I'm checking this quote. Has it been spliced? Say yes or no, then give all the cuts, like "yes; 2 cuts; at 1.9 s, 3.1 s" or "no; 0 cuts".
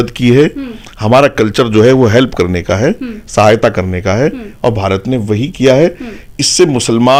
no; 0 cuts